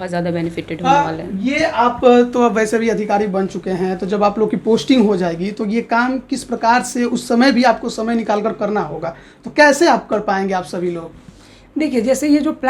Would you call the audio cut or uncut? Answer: uncut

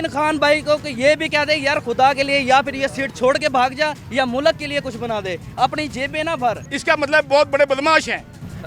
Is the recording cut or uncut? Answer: cut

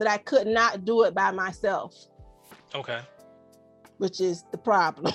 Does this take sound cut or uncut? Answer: uncut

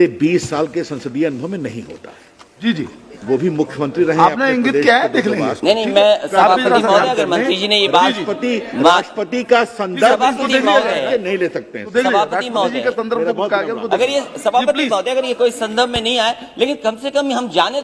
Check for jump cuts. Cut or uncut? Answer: uncut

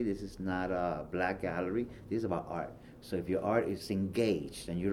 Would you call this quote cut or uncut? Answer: cut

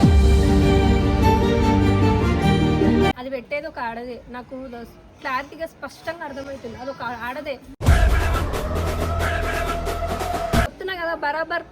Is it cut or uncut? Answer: cut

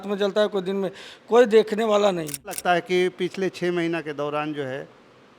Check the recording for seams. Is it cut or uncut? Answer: cut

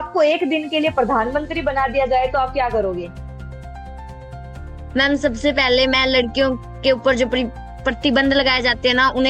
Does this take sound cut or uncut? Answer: uncut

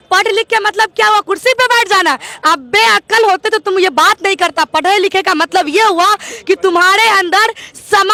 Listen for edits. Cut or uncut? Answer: uncut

